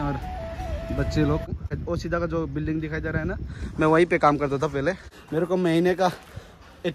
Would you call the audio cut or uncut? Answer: cut